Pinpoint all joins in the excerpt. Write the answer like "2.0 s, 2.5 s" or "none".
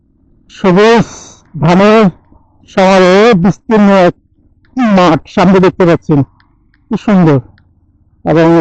none